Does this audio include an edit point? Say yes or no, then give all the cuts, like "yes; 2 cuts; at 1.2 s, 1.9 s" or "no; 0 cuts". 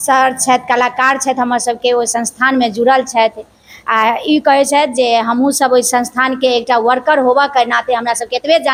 no; 0 cuts